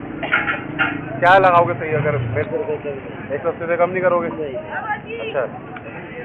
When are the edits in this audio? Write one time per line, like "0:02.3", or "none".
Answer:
none